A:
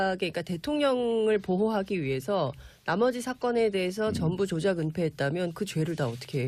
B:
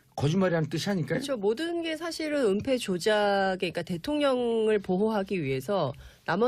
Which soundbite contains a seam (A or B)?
B